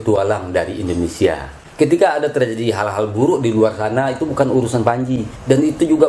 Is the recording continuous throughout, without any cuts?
no; 1 cut; at 1.6 s

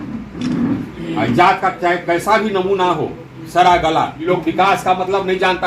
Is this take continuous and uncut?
no; 1 cut; at 4.2 s

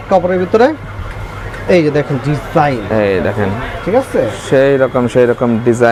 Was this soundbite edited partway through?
no; 0 cuts

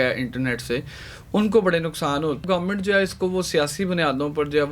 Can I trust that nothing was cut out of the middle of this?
no; 1 cut; at 2.4 s

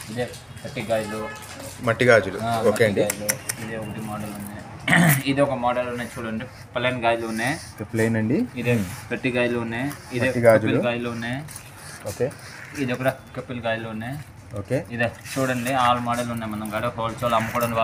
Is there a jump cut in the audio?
no; 0 cuts

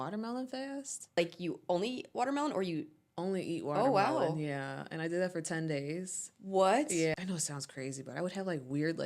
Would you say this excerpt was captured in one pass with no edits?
no; 2 cuts; at 1.2 s, 7.1 s

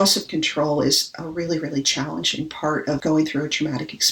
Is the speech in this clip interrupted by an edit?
yes; 1 cut; at 3.0 s

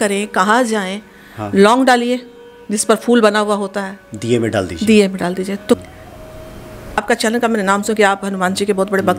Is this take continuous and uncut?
no; 1 cut; at 5.8 s

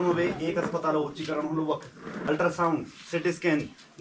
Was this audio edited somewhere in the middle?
yes; 1 cut; at 2.3 s

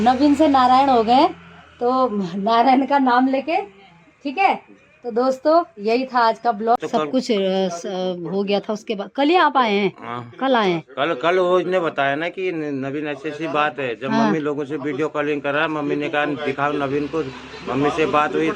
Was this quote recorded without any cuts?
no; 1 cut; at 6.8 s

